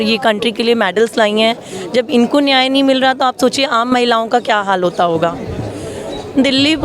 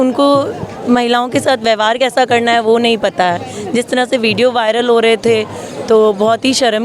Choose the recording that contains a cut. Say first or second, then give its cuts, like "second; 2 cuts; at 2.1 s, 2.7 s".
first; 1 cut; at 5.5 s